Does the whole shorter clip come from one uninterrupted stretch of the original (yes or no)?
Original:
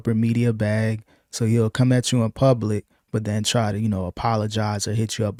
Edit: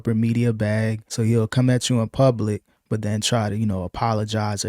no